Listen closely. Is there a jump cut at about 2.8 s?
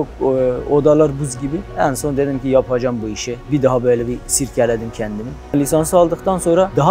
no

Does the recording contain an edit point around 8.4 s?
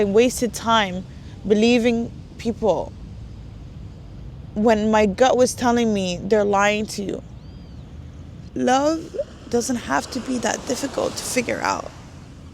yes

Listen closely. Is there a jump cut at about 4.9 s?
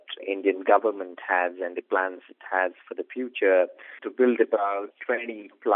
no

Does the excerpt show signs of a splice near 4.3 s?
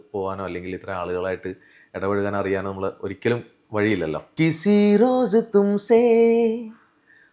yes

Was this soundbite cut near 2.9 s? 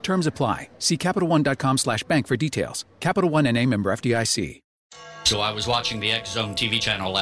no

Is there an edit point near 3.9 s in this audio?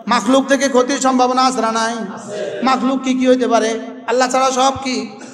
yes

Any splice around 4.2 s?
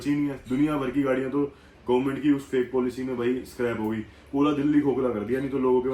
no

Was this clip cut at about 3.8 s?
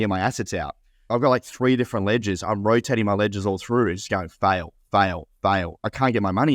no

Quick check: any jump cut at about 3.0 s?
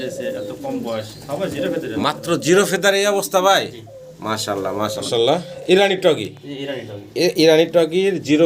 no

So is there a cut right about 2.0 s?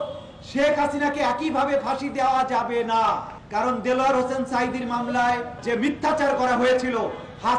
no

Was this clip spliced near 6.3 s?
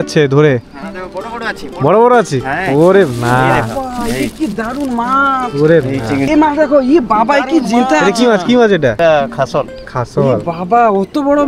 yes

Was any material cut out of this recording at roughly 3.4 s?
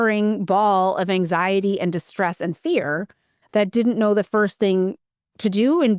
no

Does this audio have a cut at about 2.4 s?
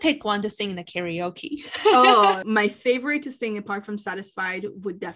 yes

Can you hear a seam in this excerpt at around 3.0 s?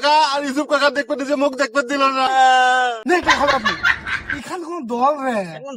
yes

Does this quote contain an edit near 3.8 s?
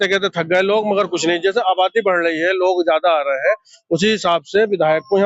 no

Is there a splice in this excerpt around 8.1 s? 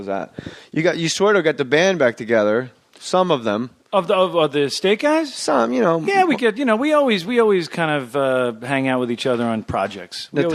no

